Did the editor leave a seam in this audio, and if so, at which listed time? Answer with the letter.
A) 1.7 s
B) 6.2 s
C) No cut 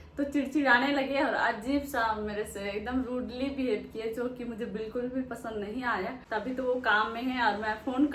B